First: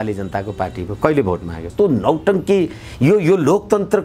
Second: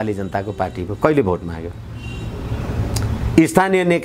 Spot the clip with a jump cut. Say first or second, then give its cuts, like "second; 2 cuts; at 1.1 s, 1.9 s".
first; 1 cut; at 1.7 s